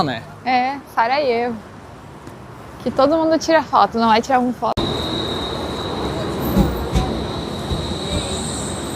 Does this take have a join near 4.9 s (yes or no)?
yes